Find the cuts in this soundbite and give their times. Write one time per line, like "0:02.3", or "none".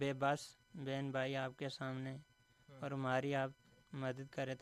none